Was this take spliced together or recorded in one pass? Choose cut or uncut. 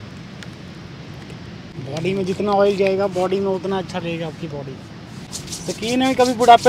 cut